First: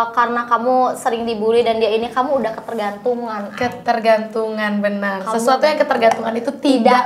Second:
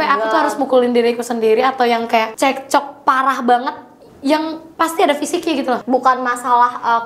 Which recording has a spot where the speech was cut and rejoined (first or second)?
second